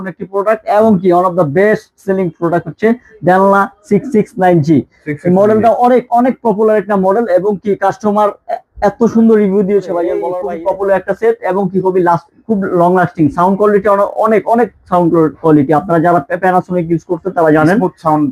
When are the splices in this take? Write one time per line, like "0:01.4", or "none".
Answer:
0:10.3

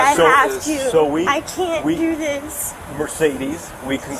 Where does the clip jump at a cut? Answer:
none

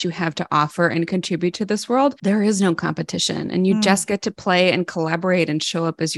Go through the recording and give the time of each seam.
0:02.2

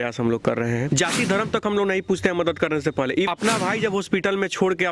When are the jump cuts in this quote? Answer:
0:00.9
0:03.3

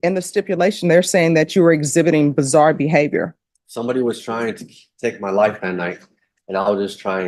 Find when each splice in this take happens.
none

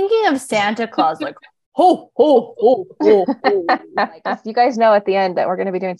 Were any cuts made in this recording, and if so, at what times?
0:04.4

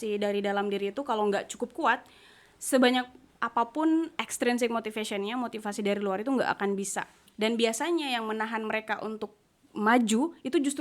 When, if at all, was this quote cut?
0:07.2

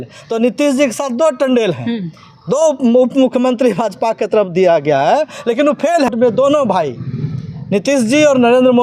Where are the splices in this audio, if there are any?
0:06.1

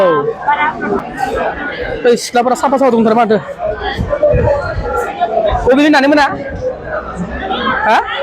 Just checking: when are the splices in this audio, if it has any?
0:01.0

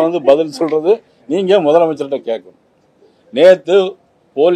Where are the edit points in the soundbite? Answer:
0:01.1

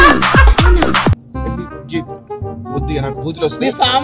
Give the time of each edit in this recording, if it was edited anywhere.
none

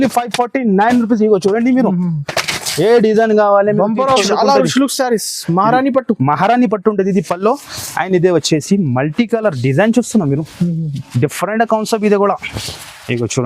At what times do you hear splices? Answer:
0:04.1

